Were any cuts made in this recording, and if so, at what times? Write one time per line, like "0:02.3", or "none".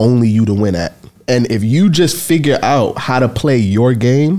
0:01.2